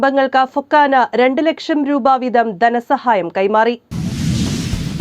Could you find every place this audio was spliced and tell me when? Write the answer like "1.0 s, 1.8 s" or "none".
3.9 s

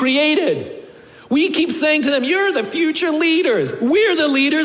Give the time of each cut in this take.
none

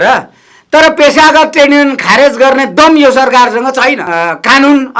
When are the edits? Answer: 4.0 s

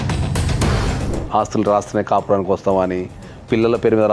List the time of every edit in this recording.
1.0 s

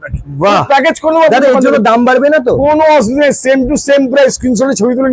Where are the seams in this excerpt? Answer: none

